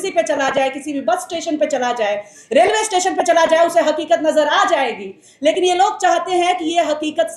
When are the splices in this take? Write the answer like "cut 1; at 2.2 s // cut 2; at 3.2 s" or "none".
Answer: none